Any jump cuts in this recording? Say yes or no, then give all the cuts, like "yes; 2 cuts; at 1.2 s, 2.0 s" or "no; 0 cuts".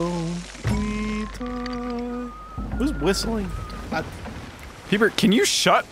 no; 0 cuts